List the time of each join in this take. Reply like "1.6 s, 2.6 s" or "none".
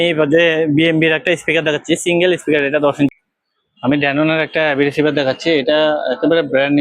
3.1 s